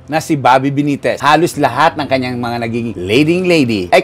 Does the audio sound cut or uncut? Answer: uncut